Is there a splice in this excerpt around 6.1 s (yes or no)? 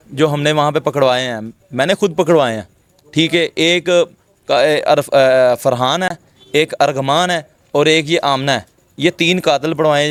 no